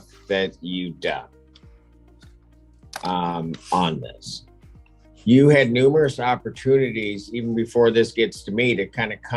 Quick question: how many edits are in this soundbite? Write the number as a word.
zero